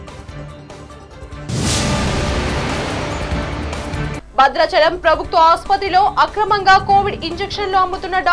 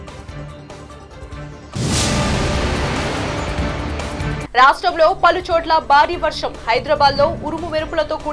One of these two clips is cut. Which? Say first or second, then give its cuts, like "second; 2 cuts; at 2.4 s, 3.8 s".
first; 2 cuts; at 1.4 s, 4.1 s